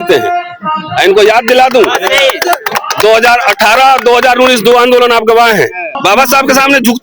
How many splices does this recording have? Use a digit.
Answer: 1